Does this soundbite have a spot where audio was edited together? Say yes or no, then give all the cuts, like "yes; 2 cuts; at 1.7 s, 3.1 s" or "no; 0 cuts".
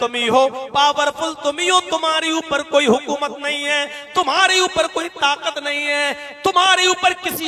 no; 0 cuts